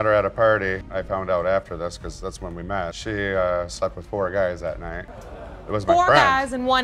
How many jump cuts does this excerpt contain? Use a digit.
0